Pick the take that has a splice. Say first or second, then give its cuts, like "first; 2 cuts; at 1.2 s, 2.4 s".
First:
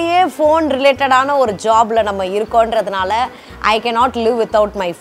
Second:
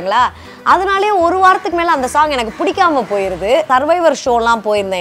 second; 1 cut; at 3.7 s